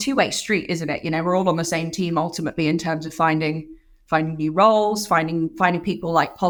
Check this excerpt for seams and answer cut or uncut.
uncut